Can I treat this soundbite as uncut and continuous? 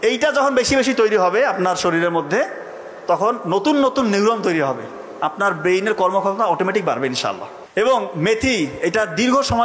no; 1 cut; at 7.5 s

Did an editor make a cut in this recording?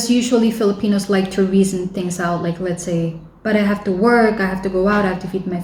no; 0 cuts

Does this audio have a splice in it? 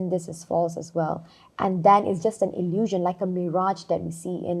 no; 0 cuts

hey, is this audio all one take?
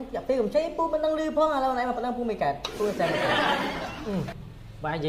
no; 2 cuts; at 3.1 s, 4.1 s

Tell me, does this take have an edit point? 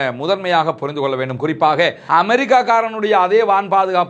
yes; 1 cut; at 2.0 s

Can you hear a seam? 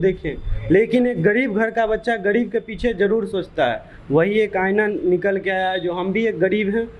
no; 0 cuts

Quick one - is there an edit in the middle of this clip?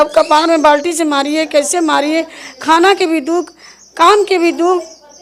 no; 0 cuts

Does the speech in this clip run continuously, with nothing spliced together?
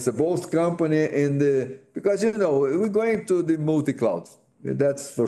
yes; 0 cuts

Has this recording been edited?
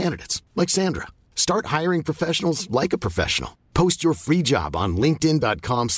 no; 0 cuts

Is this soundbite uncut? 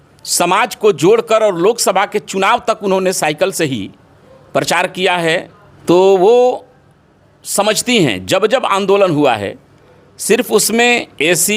no; 1 cut; at 5.6 s

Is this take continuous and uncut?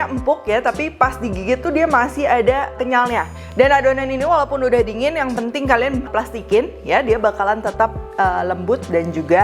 no; 2 cuts; at 3.0 s, 6.1 s

